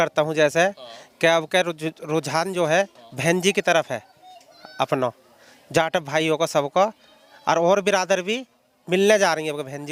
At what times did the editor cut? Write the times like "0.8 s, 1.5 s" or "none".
none